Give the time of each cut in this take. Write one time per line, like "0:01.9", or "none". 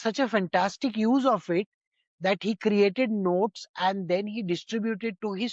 none